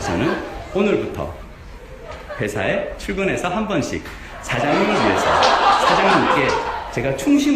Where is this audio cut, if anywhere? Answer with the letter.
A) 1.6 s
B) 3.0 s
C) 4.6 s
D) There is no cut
B